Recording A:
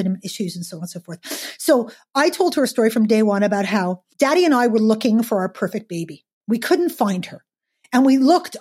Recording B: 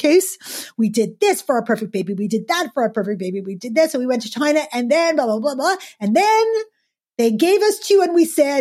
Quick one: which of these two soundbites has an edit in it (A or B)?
A